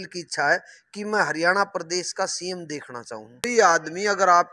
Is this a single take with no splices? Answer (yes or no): no